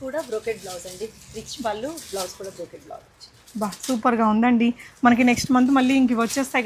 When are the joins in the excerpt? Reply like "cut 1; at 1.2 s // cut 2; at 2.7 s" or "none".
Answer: none